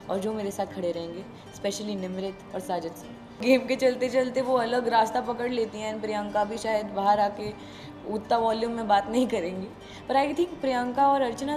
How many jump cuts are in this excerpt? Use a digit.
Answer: 1